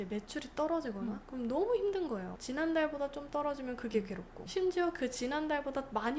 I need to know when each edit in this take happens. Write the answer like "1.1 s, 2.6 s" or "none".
2.3 s, 4.4 s